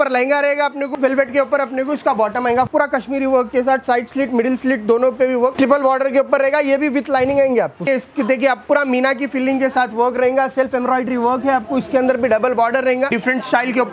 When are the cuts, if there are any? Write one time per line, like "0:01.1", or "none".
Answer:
0:00.9
0:02.7
0:05.5
0:07.9
0:13.2